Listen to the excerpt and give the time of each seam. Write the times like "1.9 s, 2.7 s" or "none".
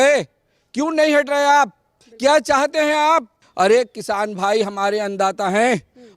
3.4 s